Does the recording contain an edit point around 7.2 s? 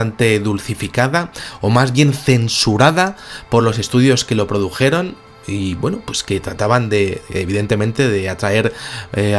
yes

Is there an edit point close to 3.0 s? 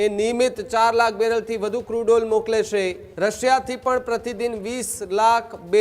yes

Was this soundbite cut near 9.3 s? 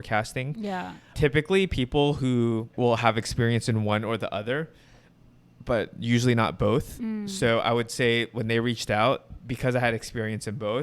yes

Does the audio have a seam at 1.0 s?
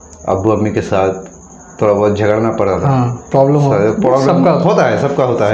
no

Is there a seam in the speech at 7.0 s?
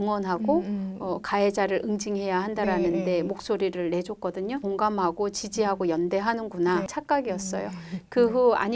yes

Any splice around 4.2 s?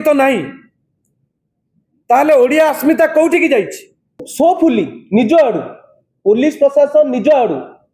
yes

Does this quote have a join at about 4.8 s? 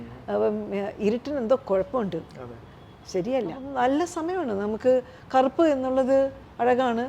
no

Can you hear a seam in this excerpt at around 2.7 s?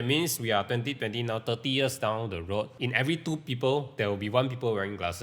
yes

